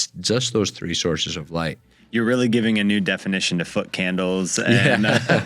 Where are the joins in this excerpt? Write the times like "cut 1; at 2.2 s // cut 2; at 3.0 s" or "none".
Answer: cut 1; at 2.1 s